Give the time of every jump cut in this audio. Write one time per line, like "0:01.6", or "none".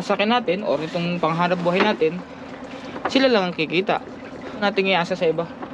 0:04.6

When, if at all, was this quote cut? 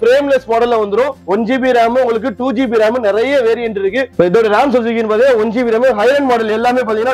0:01.2
0:04.1

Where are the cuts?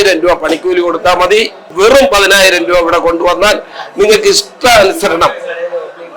0:01.7

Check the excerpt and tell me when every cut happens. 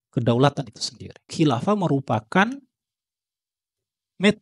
0:01.3

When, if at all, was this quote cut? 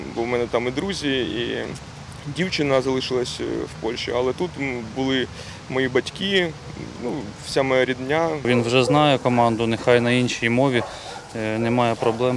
0:08.5

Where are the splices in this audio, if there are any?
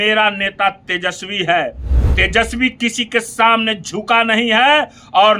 none

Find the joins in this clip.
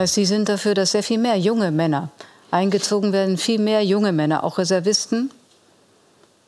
none

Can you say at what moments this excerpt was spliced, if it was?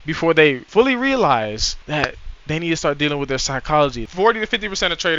0:04.0

